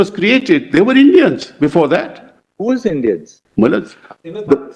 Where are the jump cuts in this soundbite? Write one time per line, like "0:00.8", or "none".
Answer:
0:03.4